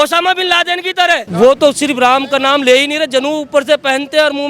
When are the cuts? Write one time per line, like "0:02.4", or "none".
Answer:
0:01.3